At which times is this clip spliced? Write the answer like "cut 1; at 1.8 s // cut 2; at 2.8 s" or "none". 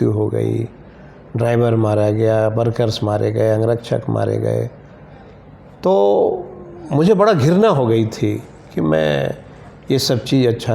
none